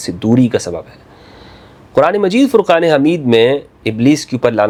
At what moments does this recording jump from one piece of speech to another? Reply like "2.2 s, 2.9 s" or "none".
none

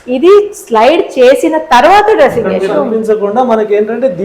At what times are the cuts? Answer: 2.7 s

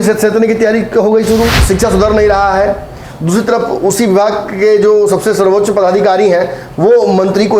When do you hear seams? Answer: 1.6 s

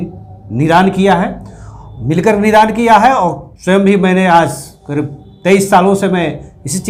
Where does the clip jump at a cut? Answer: none

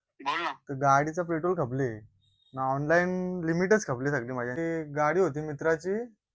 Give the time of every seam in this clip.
4.6 s

